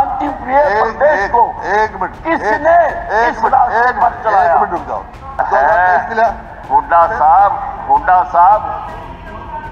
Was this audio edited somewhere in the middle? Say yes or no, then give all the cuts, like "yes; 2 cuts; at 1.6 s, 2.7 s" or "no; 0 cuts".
yes; 1 cut; at 5.4 s